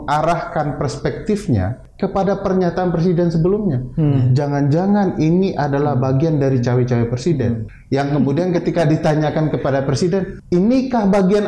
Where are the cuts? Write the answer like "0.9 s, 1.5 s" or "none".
1.8 s, 7.7 s, 10.4 s